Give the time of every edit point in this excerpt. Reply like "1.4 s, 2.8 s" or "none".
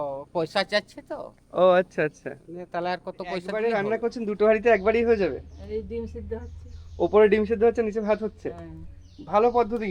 3.5 s